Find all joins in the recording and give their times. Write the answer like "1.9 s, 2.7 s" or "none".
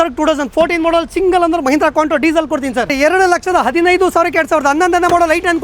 2.9 s